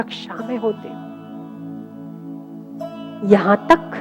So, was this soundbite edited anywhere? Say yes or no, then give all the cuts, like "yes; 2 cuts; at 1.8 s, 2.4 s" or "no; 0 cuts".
no; 0 cuts